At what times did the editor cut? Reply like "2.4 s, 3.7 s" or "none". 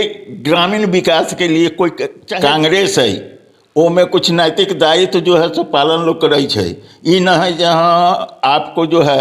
2.2 s